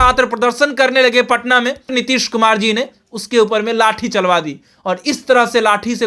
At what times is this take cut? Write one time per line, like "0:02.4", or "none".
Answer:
0:01.9